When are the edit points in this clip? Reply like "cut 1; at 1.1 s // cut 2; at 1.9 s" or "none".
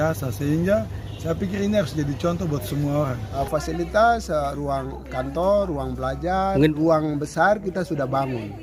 cut 1; at 3.2 s